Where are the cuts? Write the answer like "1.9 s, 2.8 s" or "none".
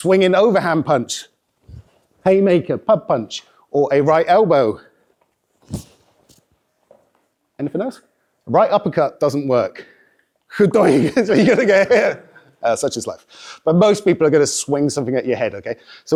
none